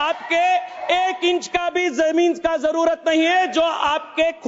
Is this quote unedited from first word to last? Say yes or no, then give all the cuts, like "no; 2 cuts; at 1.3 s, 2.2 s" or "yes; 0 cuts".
yes; 0 cuts